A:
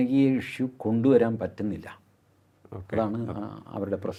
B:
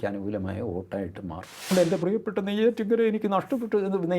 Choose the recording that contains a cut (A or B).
B